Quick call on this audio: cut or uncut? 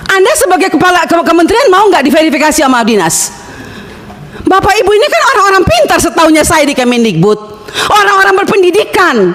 uncut